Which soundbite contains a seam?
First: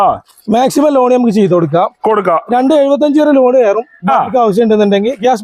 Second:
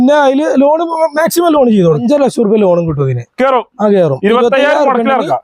second; 1 cut; at 2.0 s

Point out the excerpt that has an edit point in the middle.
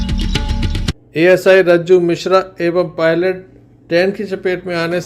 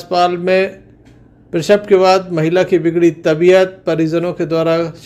first; 1 cut; at 0.9 s

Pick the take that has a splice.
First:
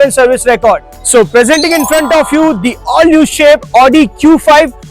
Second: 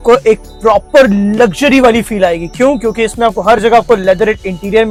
first; 1 cut; at 0.9 s

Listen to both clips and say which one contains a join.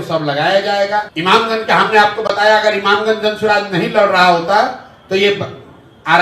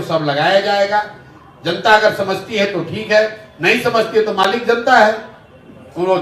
first; 1 cut; at 1.3 s

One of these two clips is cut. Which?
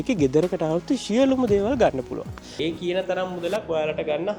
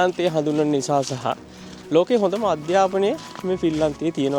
first; 1 cut; at 2.5 s

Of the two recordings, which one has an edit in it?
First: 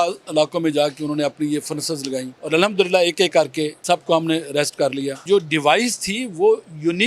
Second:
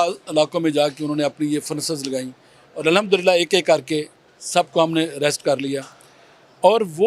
first; 3 cuts; at 2.3 s, 3.8 s, 5.2 s

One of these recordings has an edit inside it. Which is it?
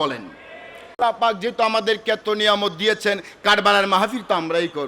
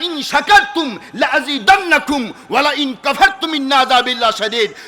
first; 1 cut; at 1.0 s

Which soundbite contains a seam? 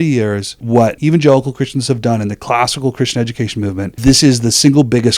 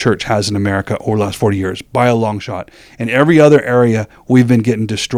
first; 2 cuts; at 0.9 s, 3.9 s

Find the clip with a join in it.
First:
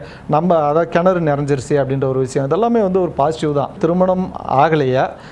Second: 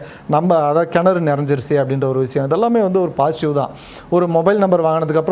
first; 1 cut; at 3.8 s

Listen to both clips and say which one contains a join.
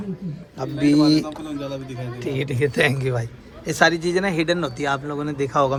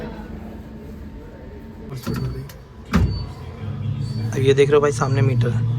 second; 1 cut; at 1.9 s

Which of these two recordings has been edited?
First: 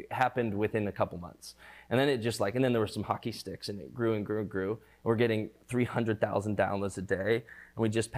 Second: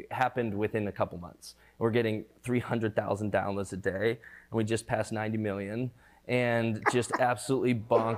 second; 1 cut; at 1.6 s

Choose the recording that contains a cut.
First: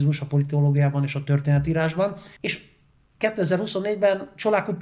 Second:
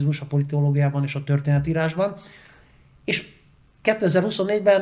first; 1 cut; at 2.3 s

